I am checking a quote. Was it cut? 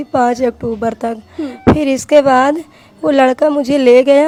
no; 0 cuts

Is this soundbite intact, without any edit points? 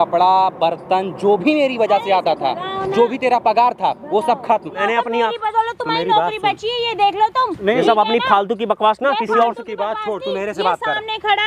no; 1 cut; at 4.8 s

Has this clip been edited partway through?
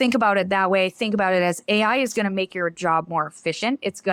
no; 0 cuts

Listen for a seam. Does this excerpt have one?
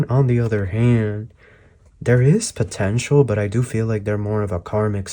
no; 0 cuts

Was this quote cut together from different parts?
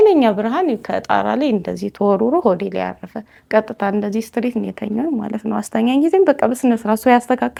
no; 0 cuts

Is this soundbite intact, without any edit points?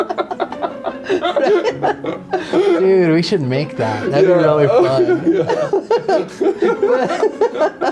yes; 0 cuts

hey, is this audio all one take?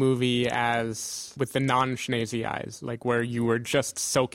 no; 1 cut; at 1.3 s

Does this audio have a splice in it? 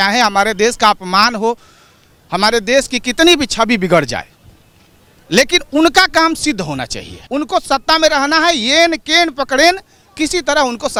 no; 0 cuts

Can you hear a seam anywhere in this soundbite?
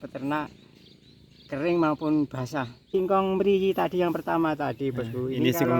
yes; 1 cut; at 2.8 s

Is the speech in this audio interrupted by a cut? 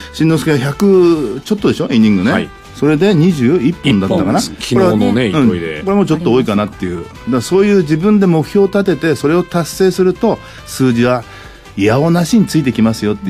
no; 0 cuts

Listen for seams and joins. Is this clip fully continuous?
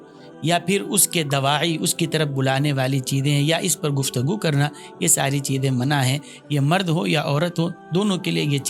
yes; 0 cuts

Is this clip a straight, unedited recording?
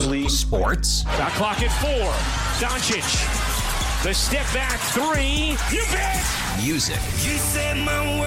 yes; 0 cuts

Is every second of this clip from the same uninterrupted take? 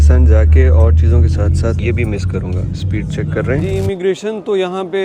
no; 2 cuts; at 1.8 s, 3.6 s

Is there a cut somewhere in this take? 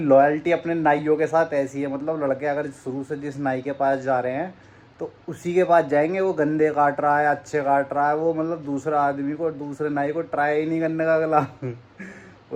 no; 0 cuts

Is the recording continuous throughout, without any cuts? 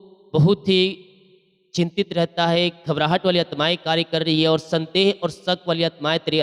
yes; 0 cuts

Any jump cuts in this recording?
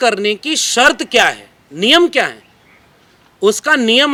no; 0 cuts

